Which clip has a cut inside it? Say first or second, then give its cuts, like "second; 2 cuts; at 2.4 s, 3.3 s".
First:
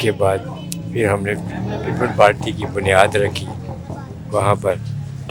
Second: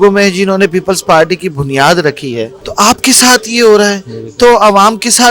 second; 1 cut; at 2.6 s